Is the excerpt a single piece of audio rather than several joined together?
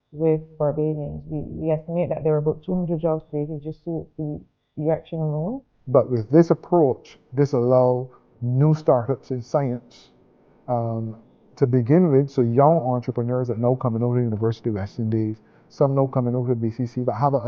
no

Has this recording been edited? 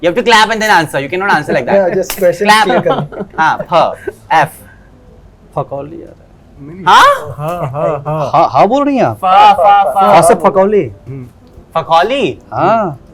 no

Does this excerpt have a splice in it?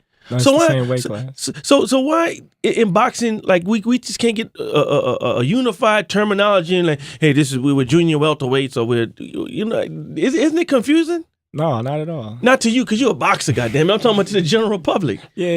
no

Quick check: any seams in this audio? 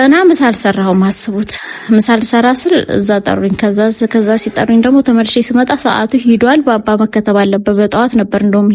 no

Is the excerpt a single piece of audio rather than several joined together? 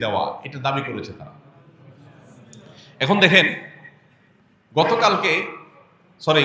yes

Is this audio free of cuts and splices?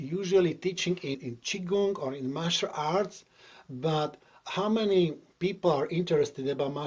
no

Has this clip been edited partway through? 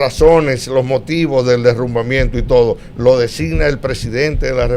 no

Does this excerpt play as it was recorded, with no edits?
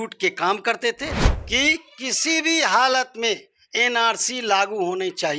no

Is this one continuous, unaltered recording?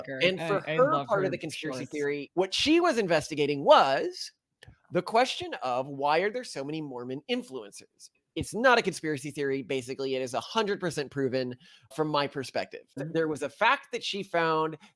no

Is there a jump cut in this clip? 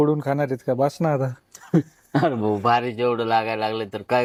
no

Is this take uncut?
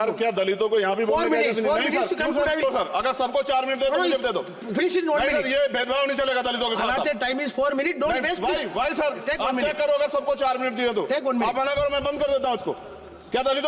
no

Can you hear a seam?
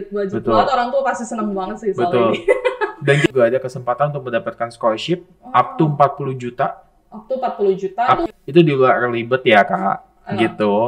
yes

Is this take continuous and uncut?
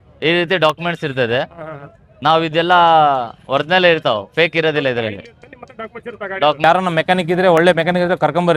no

